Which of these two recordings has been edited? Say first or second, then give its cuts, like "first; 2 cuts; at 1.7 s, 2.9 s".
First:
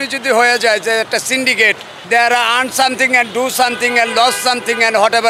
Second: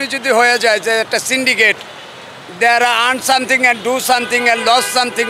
first; 1 cut; at 1.9 s